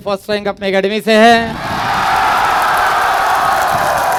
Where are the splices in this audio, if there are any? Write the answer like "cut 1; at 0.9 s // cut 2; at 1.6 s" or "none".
none